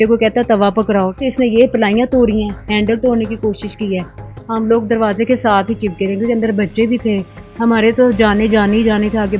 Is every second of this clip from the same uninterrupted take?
yes; 0 cuts

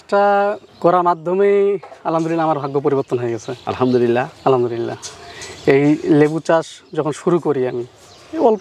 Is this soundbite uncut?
yes; 0 cuts

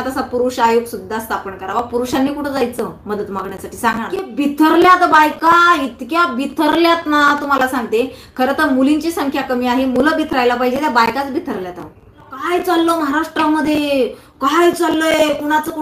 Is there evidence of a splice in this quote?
yes; 2 cuts; at 4.3 s, 12.4 s

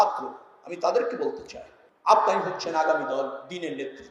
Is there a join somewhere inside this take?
no; 0 cuts

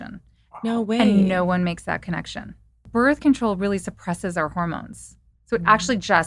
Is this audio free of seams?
no; 1 cut; at 2.8 s

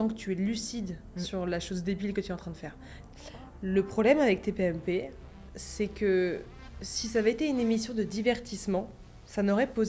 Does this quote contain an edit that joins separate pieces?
yes; 1 cut; at 3.0 s

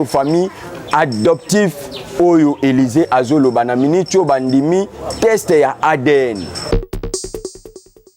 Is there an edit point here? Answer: yes; 1 cut; at 6.7 s

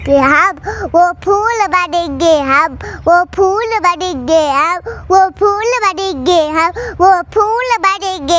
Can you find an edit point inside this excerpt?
no; 0 cuts

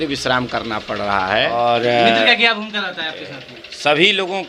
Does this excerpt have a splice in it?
yes; 1 cut; at 1.5 s

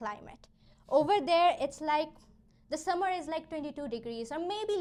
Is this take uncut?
yes; 0 cuts

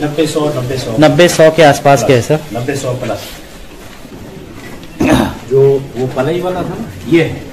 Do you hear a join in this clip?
yes; 1 cut; at 4.2 s

